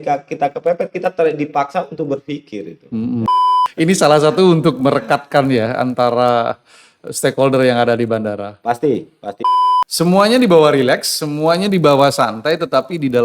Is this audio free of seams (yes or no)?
no